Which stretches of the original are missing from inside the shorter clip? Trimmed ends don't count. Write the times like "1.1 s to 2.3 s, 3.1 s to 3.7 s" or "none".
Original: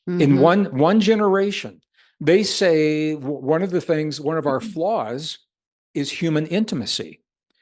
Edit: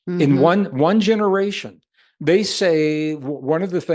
none